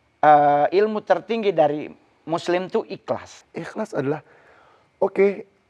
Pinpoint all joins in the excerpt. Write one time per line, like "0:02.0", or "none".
0:03.4

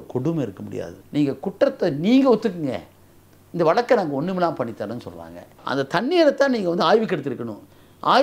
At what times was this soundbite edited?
0:00.9
0:05.6

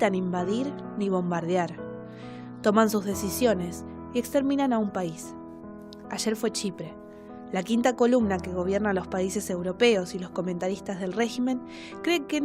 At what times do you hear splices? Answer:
0:10.1

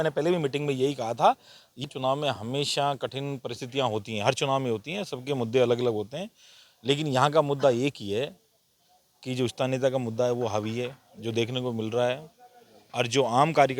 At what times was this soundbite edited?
0:01.8

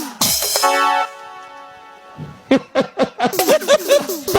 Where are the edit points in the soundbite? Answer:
none

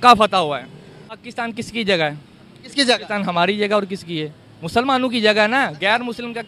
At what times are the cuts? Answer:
0:01.2

